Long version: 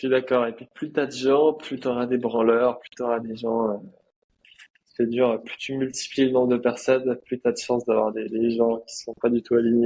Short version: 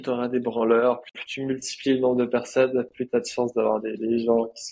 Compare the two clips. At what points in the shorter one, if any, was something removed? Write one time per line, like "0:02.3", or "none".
0:01.2